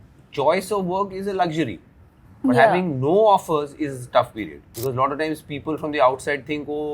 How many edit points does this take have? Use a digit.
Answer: 1